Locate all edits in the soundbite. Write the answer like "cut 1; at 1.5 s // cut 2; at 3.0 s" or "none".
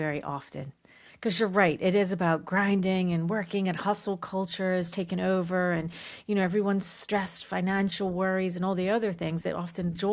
none